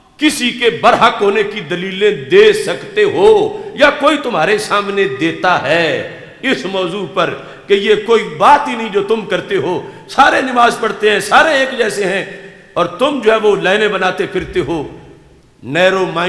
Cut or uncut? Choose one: uncut